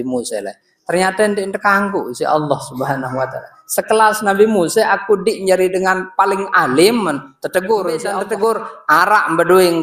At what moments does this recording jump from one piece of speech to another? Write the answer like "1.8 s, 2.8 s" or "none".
8.1 s